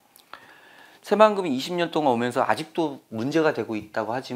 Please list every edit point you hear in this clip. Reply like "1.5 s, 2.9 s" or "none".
none